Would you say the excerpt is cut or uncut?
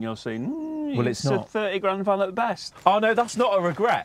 cut